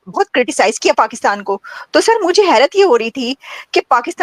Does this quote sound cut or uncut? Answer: uncut